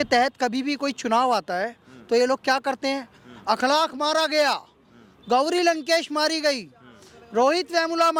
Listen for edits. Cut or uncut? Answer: uncut